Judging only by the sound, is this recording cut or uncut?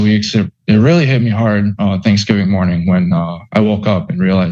uncut